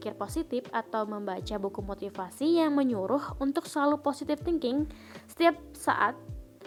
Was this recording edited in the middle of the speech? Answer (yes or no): no